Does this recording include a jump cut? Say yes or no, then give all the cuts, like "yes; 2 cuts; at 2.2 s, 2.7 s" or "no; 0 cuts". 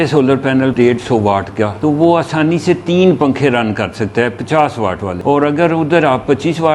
yes; 3 cuts; at 0.7 s, 1.7 s, 5.1 s